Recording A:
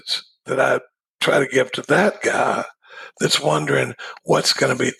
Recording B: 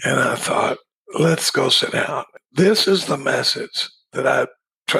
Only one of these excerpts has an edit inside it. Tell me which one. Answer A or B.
B